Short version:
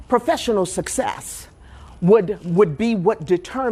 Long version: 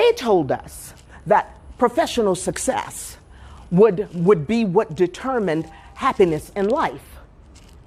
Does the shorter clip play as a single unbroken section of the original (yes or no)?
yes